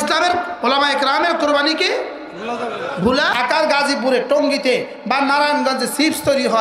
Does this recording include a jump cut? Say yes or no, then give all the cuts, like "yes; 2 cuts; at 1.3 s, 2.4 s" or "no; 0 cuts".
yes; 1 cut; at 3.3 s